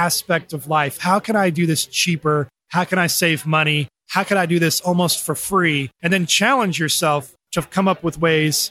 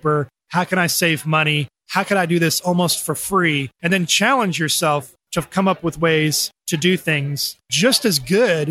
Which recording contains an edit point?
second; 1 cut; at 7.6 s

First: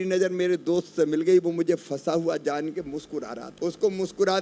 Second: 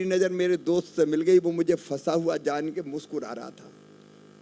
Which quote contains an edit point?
first; 1 cut; at 3.4 s

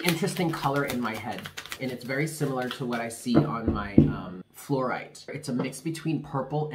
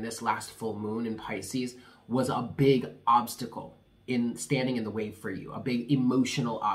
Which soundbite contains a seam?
first; 3 cuts; at 1.7 s, 4.5 s, 5.4 s

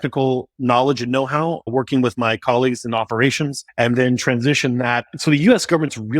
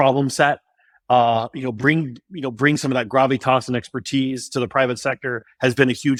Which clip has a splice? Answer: first; 3 cuts; at 1.7 s, 3.6 s, 5.1 s

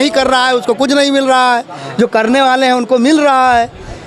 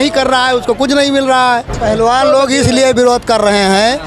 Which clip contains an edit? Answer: second; 1 cut; at 1.7 s

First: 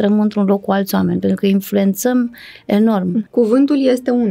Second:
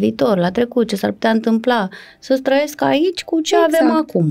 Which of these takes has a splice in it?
first; 1 cut; at 3.3 s

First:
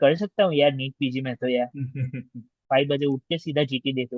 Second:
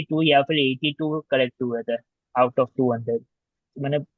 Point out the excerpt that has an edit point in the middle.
first; 1 cut; at 2.7 s

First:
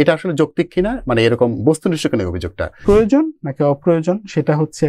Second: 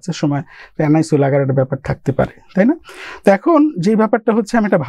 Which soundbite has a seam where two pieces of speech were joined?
first; 1 cut; at 2.7 s

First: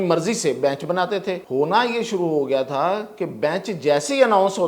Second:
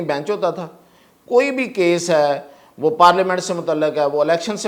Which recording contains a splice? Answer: first; 1 cut; at 1.4 s

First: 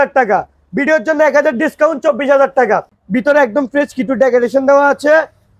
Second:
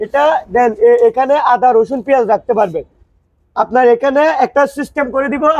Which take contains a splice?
first; 1 cut; at 2.9 s

